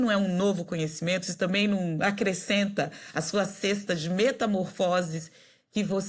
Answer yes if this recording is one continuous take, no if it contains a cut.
yes